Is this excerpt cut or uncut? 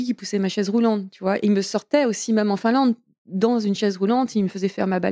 uncut